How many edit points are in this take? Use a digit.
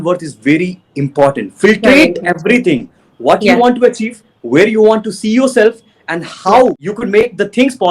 1